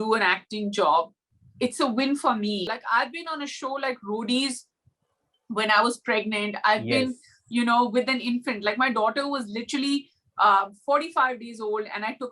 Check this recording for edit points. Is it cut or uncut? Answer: cut